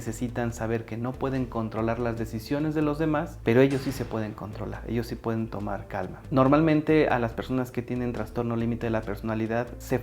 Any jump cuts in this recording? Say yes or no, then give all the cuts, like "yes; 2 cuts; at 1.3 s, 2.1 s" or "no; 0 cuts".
yes; 1 cut; at 6.2 s